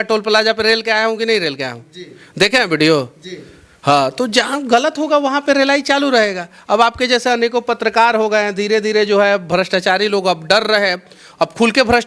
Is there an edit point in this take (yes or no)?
no